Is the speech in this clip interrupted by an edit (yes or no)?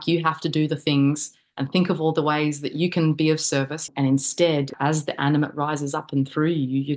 yes